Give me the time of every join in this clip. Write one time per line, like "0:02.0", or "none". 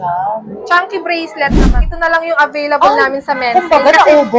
0:01.9